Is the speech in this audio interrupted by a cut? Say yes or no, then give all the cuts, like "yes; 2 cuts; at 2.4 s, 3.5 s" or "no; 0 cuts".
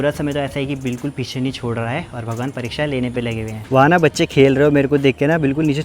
yes; 1 cut; at 3.6 s